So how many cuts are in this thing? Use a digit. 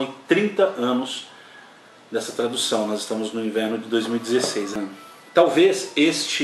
1